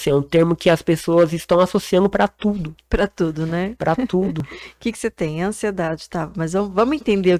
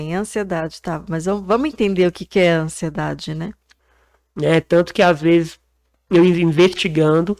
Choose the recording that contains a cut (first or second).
second